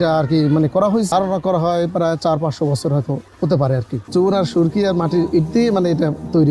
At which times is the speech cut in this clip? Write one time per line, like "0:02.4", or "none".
0:01.1
0:04.0

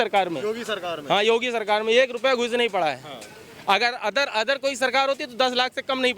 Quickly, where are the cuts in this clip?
none

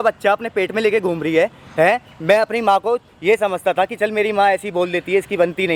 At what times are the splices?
none

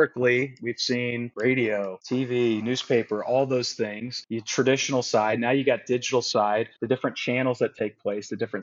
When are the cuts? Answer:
0:01.3

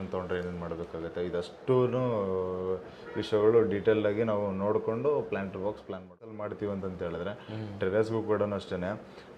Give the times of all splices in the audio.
0:06.4

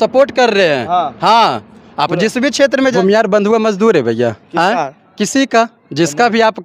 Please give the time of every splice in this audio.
0:02.9

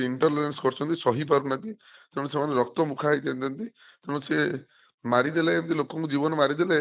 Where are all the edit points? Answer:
none

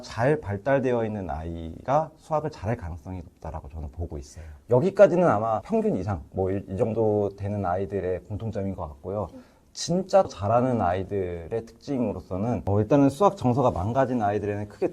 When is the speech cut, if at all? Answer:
0:12.6

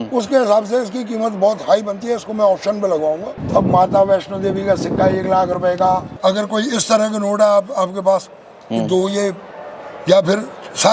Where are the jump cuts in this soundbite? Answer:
0:03.3
0:06.1

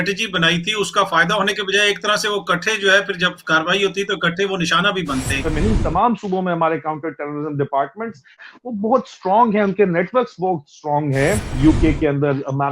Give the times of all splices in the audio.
0:05.5
0:08.5
0:11.5

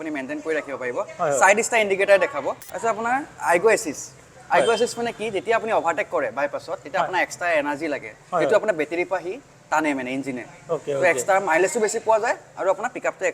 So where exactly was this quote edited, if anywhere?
0:02.6

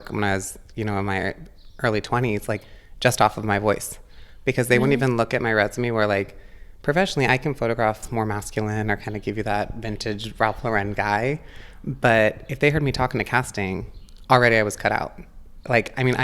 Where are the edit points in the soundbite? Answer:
0:08.0

